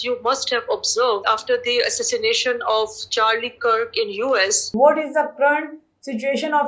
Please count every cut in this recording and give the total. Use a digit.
2